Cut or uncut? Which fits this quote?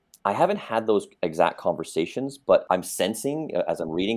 cut